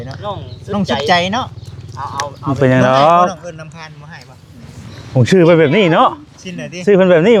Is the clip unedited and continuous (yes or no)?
yes